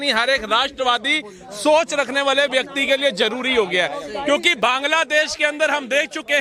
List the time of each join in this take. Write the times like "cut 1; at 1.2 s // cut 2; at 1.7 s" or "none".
cut 1; at 4.5 s